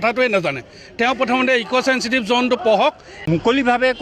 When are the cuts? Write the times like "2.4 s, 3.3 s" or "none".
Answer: 3.1 s